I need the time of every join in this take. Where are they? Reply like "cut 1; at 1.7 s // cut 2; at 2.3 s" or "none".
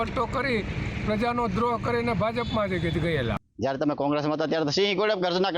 cut 1; at 3.4 s

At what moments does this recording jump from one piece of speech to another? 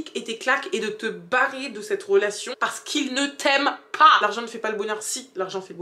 cut 1; at 2.5 s // cut 2; at 4.2 s

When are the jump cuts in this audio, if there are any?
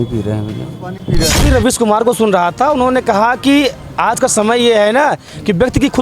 cut 1; at 1.5 s

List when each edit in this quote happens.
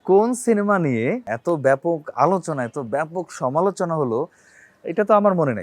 cut 1; at 1.3 s

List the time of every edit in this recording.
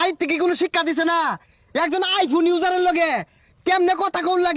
none

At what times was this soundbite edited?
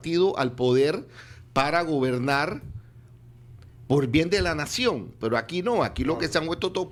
none

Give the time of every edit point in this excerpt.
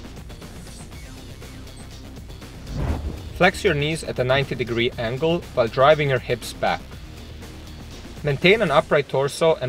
cut 1; at 2.7 s // cut 2; at 6.8 s // cut 3; at 8.2 s

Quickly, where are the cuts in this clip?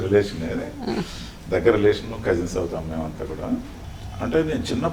cut 1; at 3.7 s

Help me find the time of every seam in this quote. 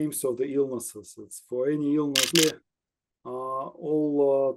cut 1; at 2.3 s

